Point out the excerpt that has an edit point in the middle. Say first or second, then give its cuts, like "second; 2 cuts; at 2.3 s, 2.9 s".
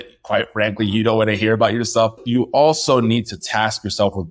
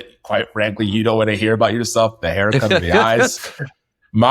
first; 1 cut; at 2.2 s